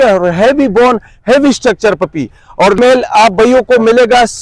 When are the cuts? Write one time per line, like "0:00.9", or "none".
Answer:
0:02.8